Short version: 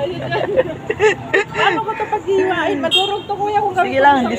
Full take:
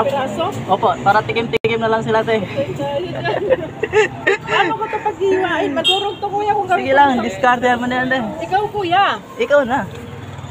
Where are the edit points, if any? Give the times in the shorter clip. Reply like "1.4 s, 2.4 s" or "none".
none